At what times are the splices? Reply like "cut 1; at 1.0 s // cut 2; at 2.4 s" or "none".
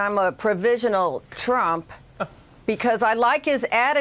cut 1; at 1.3 s